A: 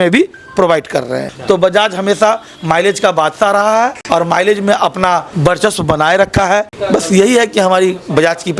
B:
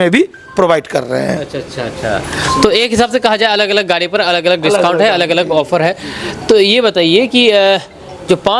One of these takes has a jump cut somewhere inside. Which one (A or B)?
A